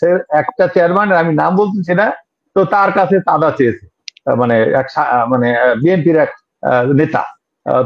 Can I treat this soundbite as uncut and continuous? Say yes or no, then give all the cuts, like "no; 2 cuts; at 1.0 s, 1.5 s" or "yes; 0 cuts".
yes; 0 cuts